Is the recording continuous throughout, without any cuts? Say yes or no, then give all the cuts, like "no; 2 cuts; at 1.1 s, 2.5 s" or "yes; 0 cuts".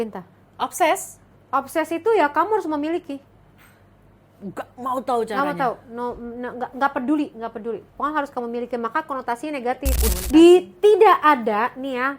no; 1 cut; at 10.1 s